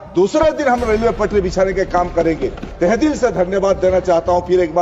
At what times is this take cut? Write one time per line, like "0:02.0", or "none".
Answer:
0:02.7